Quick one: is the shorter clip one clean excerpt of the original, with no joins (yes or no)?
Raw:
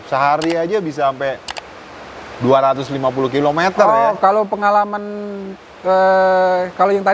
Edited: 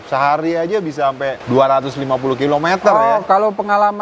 no